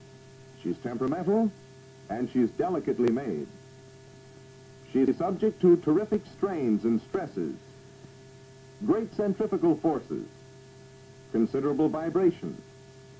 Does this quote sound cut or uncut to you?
uncut